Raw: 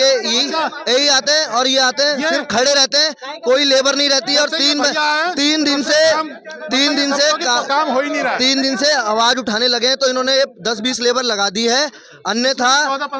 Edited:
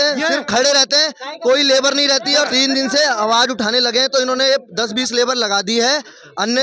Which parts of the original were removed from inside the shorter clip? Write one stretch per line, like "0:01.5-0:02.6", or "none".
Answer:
0:04.5-0:08.4